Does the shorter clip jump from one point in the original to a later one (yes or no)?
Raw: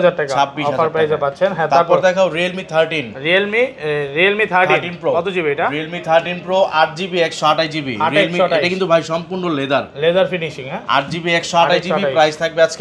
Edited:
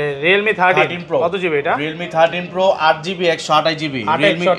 no